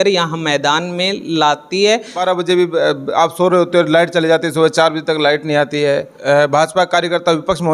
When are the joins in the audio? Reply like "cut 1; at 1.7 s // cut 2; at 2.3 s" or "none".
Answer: cut 1; at 2.2 s // cut 2; at 6.1 s